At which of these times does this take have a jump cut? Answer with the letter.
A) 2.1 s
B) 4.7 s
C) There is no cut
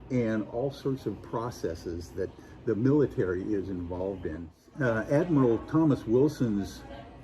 B